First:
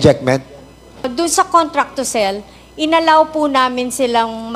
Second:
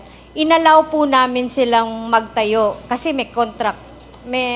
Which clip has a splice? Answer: first; 1 cut; at 1.1 s

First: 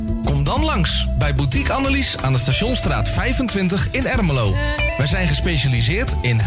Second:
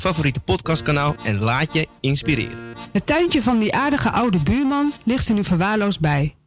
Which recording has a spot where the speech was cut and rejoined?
second; 1 cut; at 2.9 s

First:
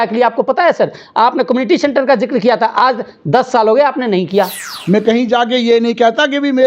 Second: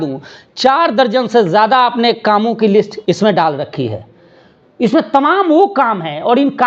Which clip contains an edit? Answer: first; 1 cut; at 4.7 s

